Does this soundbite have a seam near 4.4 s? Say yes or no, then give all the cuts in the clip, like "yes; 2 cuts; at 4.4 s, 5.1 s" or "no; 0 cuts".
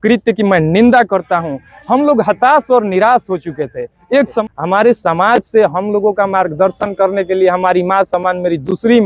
yes; 1 cut; at 4.4 s